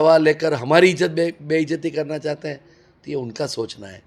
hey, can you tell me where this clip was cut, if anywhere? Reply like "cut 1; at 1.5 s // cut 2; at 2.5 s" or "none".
none